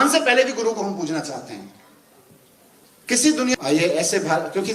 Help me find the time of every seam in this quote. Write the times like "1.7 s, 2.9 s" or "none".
3.5 s

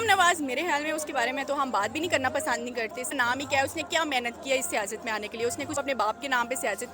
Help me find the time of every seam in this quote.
3.1 s, 5.8 s

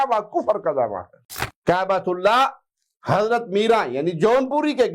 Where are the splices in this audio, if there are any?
1.2 s

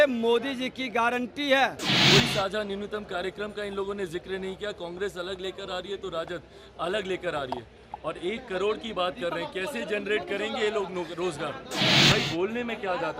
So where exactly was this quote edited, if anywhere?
1.9 s, 12.0 s

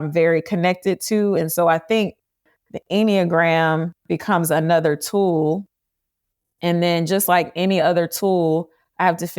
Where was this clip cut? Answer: 2.5 s

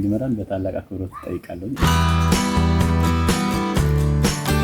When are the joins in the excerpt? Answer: 1.8 s

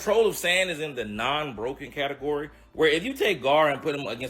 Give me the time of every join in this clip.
none

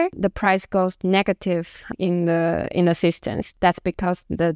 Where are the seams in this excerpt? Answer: none

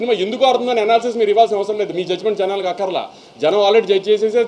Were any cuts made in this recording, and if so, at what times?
none

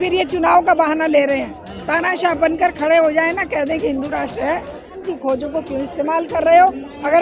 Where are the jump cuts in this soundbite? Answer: 5.0 s

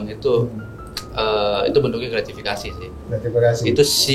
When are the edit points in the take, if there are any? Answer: none

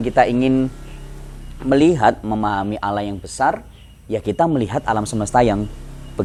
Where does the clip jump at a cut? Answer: none

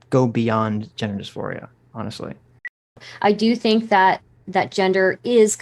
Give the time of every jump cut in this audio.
2.9 s

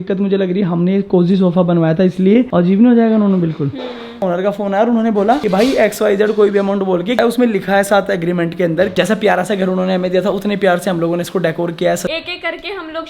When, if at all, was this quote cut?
2.5 s, 4.2 s, 7.2 s, 8.9 s, 12.1 s

